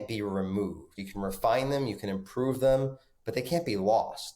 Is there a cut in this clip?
yes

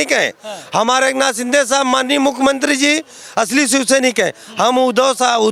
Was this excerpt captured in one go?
yes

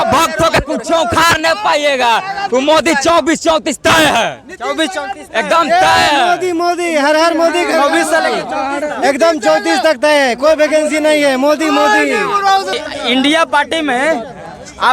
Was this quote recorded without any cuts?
no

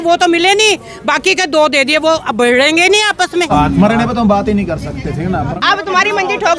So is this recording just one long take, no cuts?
no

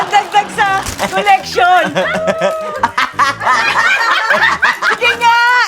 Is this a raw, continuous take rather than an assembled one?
no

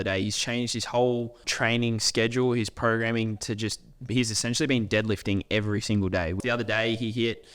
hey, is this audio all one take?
no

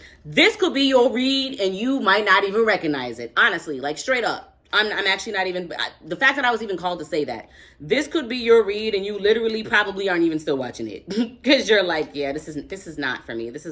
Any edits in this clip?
no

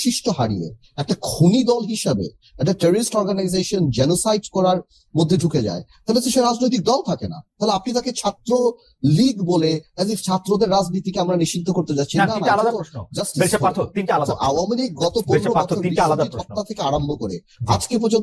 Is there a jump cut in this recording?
no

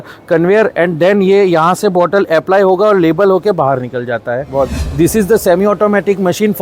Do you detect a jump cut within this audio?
yes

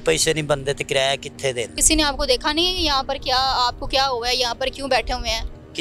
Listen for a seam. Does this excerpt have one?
yes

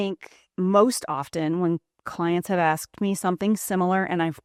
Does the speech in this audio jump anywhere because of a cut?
no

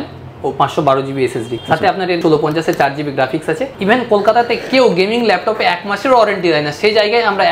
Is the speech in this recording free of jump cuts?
no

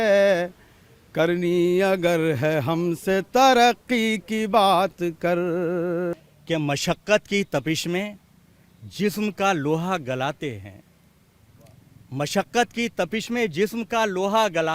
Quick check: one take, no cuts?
no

